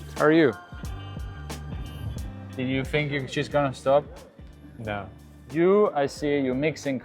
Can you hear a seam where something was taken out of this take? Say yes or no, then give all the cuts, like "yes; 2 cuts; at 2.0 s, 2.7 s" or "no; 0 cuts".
yes; 2 cuts; at 2.5 s, 5.5 s